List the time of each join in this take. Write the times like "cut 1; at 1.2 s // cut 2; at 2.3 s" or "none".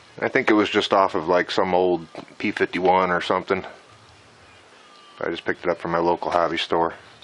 none